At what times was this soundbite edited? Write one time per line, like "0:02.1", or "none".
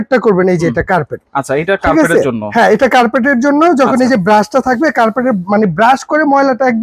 none